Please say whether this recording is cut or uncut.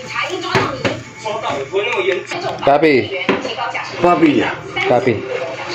cut